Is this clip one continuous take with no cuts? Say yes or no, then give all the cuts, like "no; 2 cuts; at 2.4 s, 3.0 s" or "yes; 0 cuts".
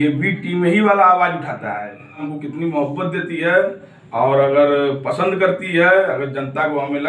no; 1 cut; at 2.3 s